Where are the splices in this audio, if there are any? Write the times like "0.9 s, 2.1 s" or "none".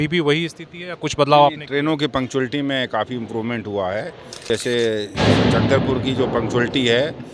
4.5 s